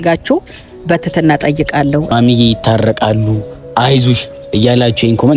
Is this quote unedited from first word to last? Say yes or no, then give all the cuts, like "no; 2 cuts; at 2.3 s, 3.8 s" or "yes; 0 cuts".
no; 1 cut; at 2.1 s